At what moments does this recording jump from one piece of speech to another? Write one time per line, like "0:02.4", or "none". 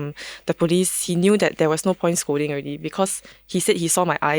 0:01.0